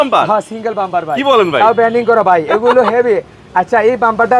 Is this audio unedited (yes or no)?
yes